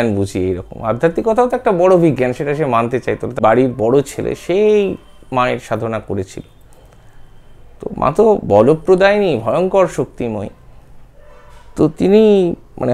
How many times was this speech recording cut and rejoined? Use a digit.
1